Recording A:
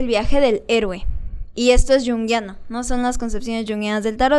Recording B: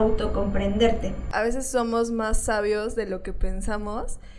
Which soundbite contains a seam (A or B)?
B